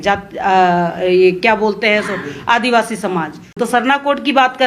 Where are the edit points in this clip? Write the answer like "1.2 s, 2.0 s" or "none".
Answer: 3.6 s